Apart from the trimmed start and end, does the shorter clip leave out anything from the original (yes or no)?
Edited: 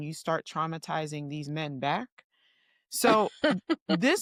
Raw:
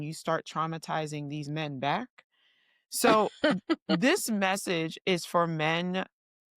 no